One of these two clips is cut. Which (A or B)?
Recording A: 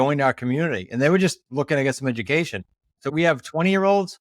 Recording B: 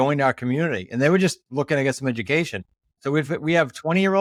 A